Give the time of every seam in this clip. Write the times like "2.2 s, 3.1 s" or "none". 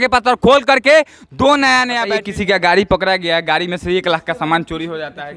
2.0 s